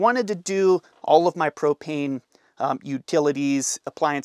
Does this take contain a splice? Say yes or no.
no